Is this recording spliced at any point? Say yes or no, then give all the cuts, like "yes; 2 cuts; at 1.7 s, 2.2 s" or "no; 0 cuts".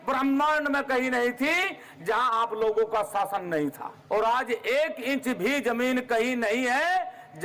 yes; 1 cut; at 3.9 s